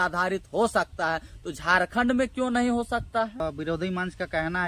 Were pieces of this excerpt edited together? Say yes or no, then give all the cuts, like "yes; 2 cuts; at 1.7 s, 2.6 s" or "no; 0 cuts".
yes; 1 cut; at 3.4 s